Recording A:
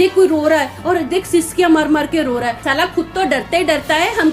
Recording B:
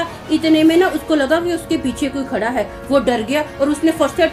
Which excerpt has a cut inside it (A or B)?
A